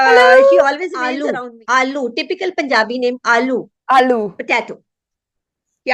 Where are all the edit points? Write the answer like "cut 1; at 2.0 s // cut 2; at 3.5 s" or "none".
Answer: cut 1; at 1.1 s